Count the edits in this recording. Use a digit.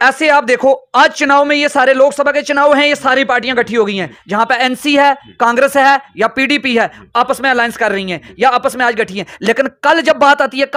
0